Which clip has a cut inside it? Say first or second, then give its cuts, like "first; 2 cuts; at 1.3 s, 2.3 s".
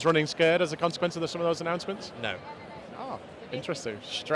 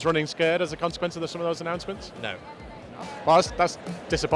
second; 1 cut; at 3.0 s